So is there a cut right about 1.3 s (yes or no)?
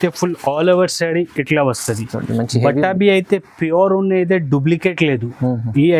no